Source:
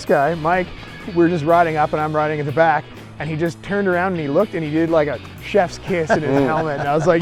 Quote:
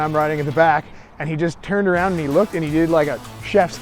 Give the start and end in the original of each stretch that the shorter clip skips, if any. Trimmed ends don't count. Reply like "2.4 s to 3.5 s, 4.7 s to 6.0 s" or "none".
none